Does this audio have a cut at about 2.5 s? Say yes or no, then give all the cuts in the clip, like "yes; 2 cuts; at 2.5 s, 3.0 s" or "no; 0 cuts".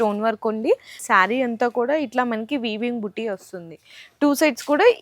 no; 1 cut; at 1.0 s